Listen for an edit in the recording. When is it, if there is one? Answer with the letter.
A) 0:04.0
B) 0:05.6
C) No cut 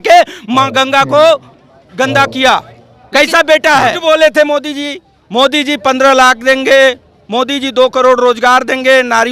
A